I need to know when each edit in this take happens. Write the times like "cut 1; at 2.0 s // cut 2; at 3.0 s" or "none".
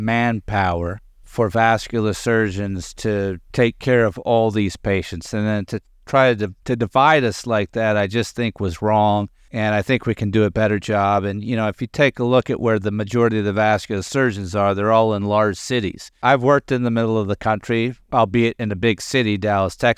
cut 1; at 1.2 s // cut 2; at 3.4 s // cut 3; at 6.5 s // cut 4; at 9.4 s // cut 5; at 16.2 s // cut 6; at 18.0 s